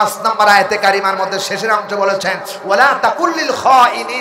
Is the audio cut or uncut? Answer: uncut